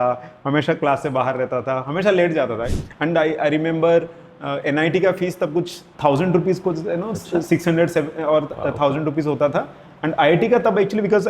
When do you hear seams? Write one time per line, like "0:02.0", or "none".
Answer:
0:02.7
0:05.8